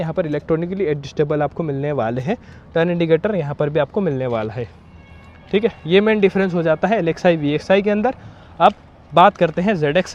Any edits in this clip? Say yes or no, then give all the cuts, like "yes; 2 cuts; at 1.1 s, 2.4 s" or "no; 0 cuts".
no; 0 cuts